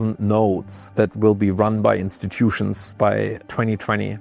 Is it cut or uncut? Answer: uncut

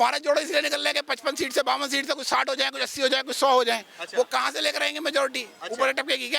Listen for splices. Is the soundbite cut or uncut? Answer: uncut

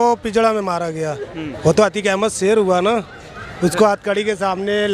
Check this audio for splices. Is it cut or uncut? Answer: cut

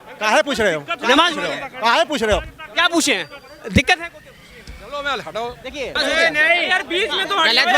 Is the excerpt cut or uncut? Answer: cut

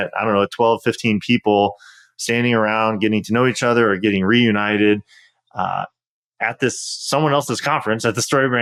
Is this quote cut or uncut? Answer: uncut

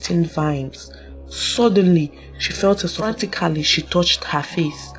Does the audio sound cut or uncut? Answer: cut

